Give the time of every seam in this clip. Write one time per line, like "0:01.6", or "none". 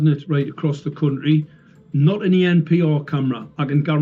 none